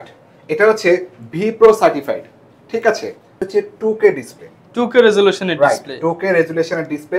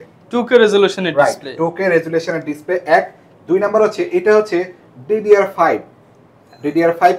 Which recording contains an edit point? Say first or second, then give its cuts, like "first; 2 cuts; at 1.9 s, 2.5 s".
first; 1 cut; at 3.5 s